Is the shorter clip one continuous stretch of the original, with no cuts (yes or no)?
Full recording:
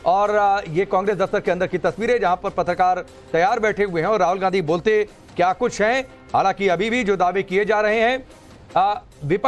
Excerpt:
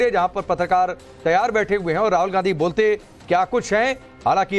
yes